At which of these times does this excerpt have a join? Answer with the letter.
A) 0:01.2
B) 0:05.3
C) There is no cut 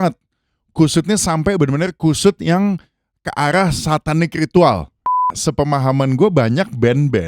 B